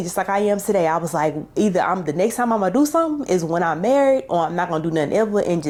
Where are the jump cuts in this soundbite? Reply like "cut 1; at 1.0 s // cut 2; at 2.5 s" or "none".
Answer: none